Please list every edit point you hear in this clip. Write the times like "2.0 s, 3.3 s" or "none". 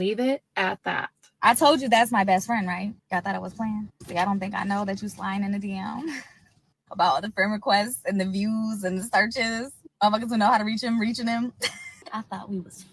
1.2 s, 12.1 s